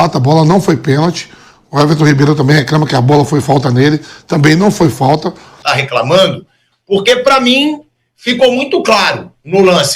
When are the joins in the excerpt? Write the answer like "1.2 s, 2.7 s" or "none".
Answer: 5.6 s